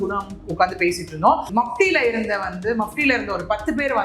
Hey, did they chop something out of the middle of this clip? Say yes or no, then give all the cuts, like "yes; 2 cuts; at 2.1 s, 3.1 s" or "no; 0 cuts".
yes; 1 cut; at 1.5 s